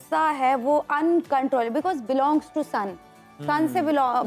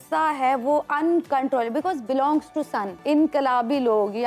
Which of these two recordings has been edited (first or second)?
second